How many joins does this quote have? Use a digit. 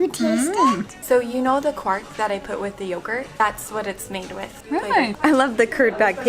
3